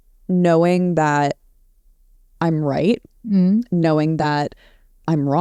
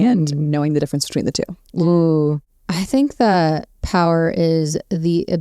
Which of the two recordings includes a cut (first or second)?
second